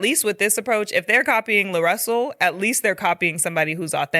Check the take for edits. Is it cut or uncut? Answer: uncut